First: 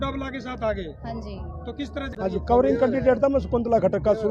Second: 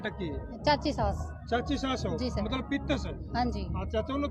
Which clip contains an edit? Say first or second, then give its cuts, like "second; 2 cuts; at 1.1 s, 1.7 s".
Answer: first; 1 cut; at 2.1 s